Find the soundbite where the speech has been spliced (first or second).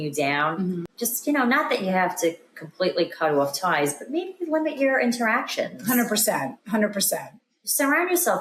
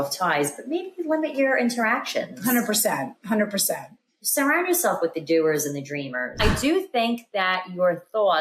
second